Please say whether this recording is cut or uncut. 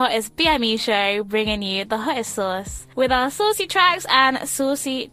uncut